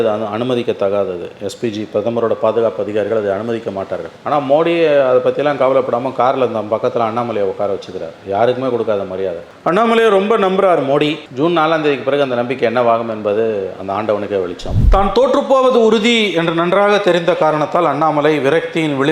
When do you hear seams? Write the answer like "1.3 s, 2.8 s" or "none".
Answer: 14.7 s